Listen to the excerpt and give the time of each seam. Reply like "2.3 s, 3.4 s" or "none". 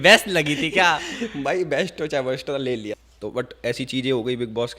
3.0 s